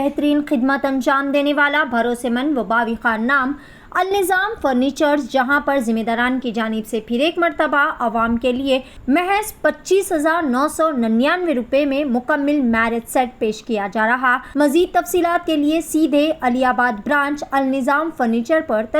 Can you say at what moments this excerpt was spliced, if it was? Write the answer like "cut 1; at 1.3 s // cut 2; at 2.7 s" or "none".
cut 1; at 8.9 s // cut 2; at 14.4 s